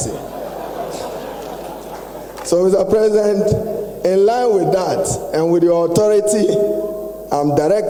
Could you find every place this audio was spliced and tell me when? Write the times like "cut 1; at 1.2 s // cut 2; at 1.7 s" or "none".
none